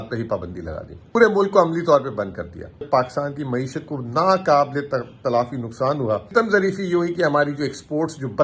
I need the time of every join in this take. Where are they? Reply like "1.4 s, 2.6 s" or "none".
1.1 s, 2.9 s, 6.3 s